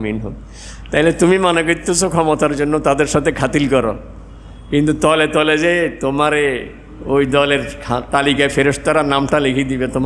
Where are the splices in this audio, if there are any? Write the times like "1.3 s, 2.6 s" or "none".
none